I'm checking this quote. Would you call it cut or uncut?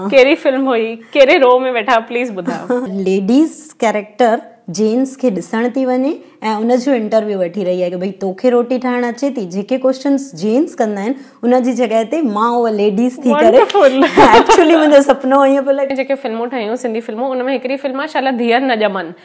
cut